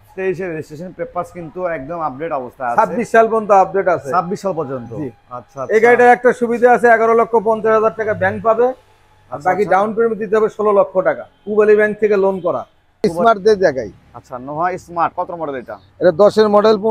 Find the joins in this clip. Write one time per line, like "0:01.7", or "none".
0:13.0